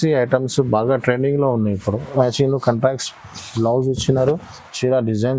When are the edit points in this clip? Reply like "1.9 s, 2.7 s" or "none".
2.2 s